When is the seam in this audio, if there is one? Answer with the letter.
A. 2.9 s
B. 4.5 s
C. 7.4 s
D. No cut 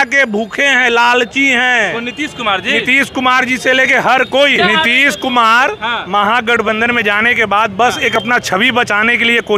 B